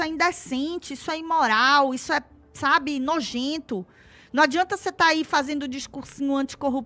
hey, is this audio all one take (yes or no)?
yes